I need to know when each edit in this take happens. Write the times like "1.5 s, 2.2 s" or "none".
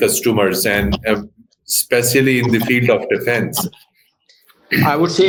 none